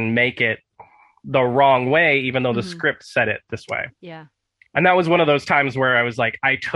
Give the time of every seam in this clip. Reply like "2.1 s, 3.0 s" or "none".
none